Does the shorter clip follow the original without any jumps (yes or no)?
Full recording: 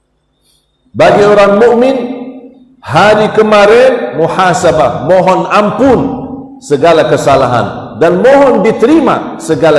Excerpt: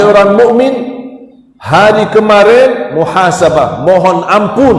yes